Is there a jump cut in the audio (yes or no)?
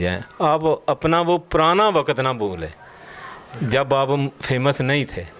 no